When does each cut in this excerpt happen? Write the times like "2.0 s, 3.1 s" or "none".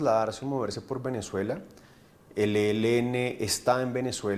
none